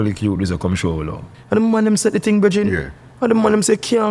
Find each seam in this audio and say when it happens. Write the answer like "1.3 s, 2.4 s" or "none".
1.3 s